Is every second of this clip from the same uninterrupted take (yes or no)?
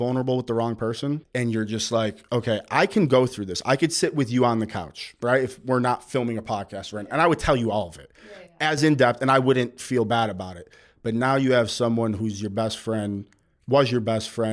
no